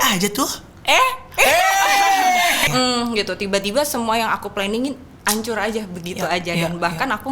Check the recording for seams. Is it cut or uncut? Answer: cut